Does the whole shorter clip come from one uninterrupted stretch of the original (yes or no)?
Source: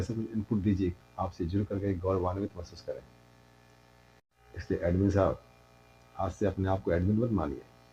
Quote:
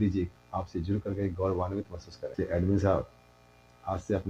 no